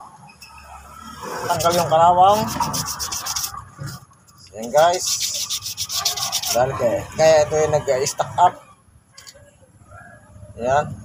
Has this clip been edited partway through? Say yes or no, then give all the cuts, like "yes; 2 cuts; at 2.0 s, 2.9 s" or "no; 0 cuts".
yes; 1 cut; at 1.5 s